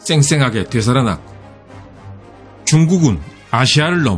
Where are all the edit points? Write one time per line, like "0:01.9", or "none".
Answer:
none